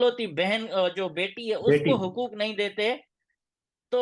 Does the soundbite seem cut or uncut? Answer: uncut